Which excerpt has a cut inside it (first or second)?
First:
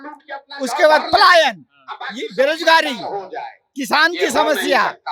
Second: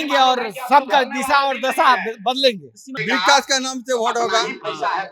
second